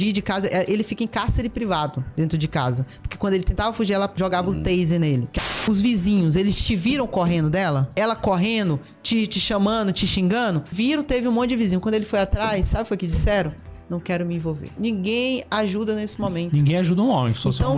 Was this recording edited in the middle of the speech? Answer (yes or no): yes